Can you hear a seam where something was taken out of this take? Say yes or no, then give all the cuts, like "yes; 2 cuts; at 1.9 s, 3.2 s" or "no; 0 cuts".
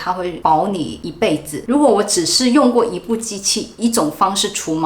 yes; 1 cut; at 1.6 s